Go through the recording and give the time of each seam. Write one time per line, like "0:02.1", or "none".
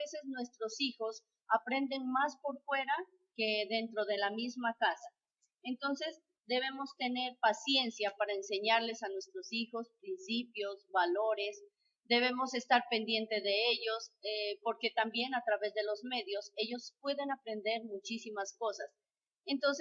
0:09.7